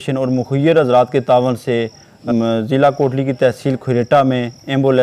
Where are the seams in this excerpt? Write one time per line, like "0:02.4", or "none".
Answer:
0:02.2